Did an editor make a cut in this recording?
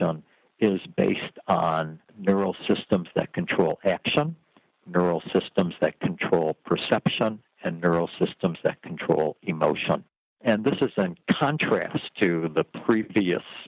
no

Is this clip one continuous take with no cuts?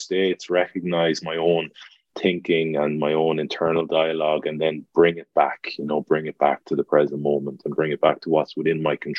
no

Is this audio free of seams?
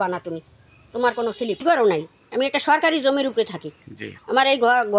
no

